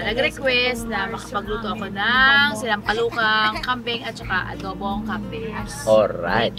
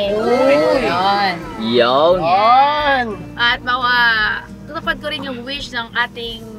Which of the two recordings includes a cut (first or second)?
second